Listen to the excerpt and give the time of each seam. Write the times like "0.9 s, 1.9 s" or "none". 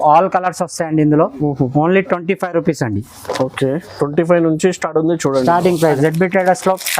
5.9 s